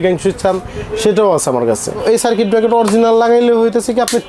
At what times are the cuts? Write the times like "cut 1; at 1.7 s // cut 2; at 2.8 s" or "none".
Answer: cut 1; at 2.0 s